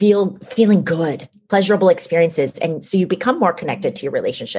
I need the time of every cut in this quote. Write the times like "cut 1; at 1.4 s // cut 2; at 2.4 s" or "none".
cut 1; at 1.4 s